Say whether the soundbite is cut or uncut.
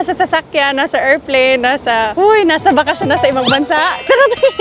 uncut